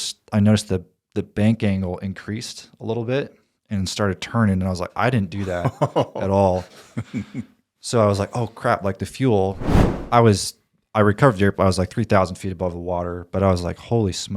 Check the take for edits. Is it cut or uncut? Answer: cut